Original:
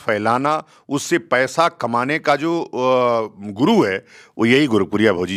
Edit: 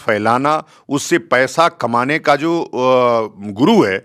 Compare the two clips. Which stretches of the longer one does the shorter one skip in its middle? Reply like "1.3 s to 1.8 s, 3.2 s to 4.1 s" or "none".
none